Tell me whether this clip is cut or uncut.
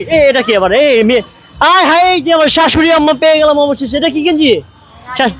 uncut